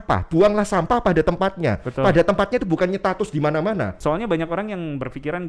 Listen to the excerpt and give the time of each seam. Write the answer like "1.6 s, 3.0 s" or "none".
3.9 s